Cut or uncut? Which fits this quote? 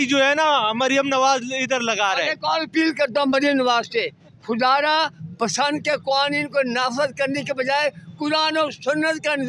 uncut